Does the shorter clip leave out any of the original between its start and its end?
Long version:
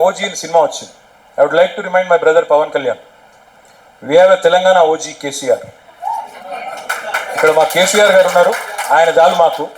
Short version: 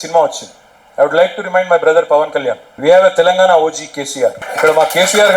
yes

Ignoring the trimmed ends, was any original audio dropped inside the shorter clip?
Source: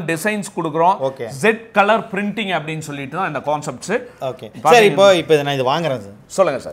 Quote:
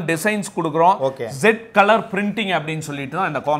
no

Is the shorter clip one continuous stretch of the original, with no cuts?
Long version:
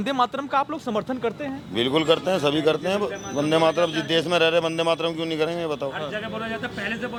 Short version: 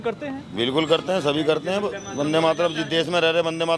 yes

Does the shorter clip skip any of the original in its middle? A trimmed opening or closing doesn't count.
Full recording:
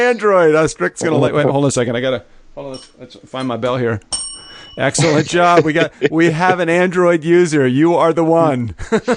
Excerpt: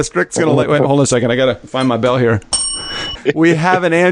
yes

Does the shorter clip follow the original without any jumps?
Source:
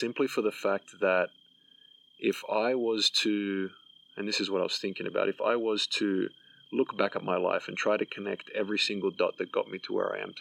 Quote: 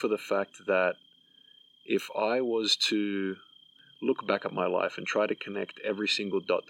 no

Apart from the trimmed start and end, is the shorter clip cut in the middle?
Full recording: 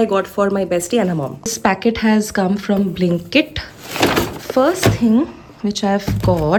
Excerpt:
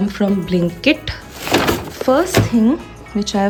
no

